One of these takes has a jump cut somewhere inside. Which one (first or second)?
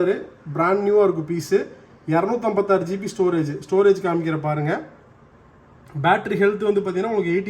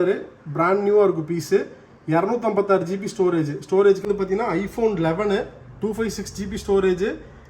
second